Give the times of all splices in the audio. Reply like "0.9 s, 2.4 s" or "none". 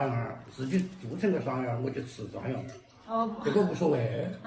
none